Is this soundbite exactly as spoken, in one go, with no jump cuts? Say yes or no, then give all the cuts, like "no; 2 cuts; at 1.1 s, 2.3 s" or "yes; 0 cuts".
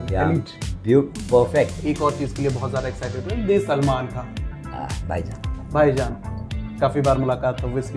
no; 1 cut; at 1.8 s